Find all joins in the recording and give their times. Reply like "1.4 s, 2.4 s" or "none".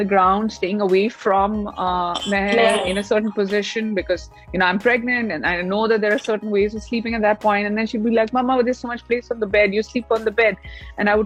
none